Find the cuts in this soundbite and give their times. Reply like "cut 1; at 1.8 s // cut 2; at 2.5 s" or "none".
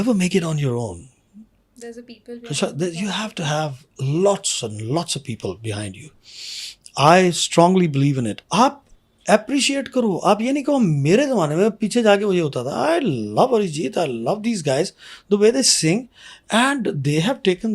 cut 1; at 8.4 s